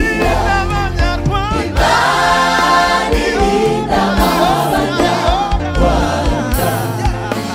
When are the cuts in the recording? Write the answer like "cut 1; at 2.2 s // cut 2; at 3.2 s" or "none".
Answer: none